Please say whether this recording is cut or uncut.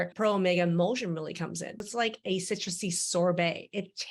cut